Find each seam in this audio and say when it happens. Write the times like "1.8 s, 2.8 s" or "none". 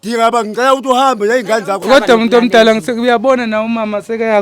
1.8 s